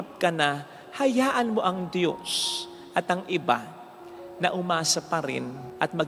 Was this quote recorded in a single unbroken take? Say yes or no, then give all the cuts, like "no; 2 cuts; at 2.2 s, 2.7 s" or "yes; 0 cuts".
yes; 0 cuts